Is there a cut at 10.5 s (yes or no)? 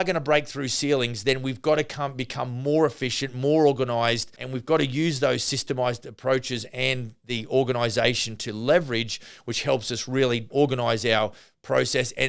yes